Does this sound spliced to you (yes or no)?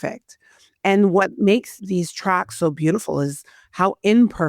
yes